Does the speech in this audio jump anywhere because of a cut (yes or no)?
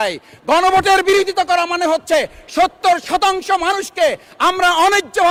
no